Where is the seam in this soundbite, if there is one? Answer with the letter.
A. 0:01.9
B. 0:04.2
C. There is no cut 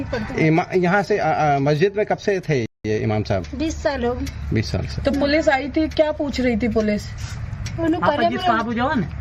C